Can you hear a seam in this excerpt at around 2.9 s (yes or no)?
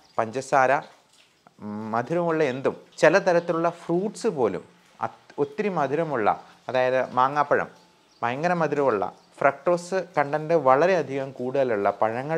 yes